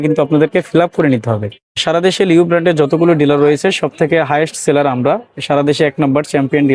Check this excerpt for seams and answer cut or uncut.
cut